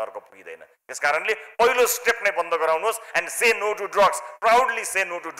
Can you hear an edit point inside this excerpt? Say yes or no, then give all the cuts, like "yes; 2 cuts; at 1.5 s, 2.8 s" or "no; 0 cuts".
no; 0 cuts